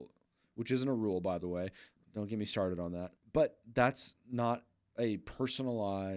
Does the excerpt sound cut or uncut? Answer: uncut